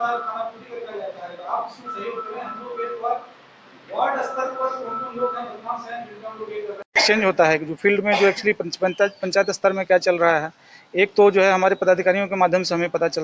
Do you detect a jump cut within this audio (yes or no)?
yes